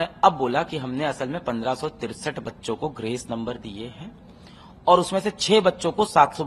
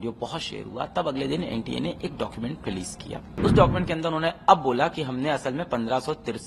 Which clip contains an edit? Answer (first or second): second